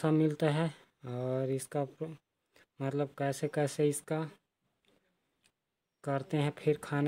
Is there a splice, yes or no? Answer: no